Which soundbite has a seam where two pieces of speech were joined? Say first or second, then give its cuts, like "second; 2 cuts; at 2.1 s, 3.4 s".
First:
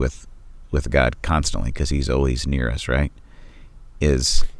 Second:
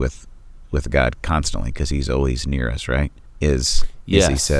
second; 1 cut; at 3.2 s